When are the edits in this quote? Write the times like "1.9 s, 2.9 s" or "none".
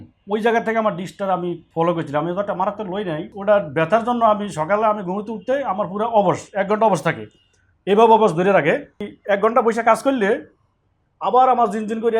3.3 s, 9.1 s